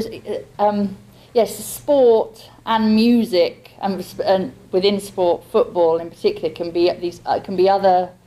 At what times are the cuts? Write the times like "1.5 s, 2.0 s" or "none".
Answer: 6.8 s